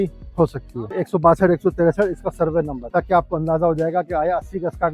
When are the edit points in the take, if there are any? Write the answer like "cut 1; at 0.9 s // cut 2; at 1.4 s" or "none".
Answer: cut 1; at 1.0 s // cut 2; at 2.8 s